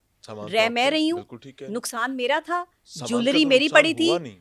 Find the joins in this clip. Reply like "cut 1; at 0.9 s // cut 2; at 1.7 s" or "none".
none